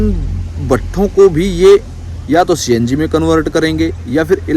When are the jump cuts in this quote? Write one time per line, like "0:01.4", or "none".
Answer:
none